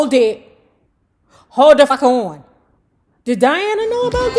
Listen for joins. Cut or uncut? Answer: cut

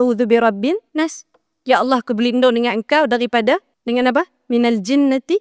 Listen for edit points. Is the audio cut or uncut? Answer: cut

